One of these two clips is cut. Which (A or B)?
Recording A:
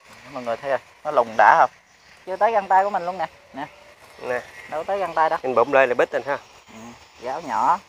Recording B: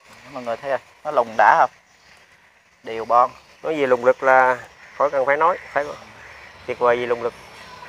A